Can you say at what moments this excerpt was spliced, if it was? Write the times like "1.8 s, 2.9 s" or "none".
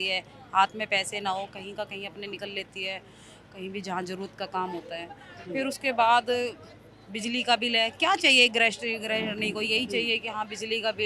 none